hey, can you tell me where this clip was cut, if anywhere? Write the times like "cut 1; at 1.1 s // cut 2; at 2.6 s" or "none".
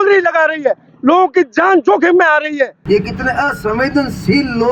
cut 1; at 2.8 s